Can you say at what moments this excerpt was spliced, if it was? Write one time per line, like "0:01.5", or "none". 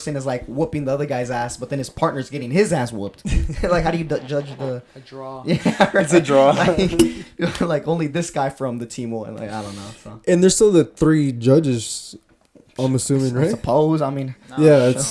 none